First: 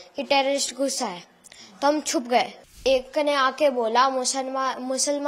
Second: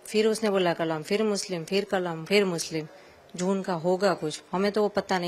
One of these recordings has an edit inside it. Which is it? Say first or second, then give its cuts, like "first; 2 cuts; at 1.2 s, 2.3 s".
first; 1 cut; at 2.8 s